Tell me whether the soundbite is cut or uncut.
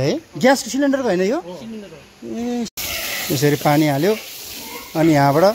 cut